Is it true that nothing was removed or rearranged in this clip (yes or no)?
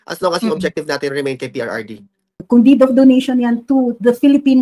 no